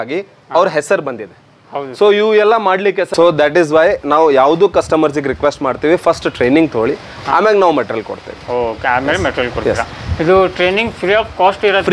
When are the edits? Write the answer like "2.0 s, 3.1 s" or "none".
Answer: 3.1 s